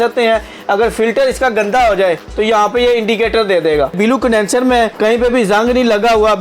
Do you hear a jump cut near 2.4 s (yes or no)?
no